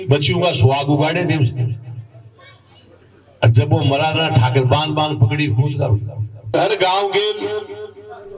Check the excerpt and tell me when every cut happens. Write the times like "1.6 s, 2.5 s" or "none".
6.5 s